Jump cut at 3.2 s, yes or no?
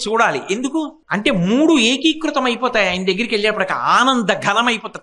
no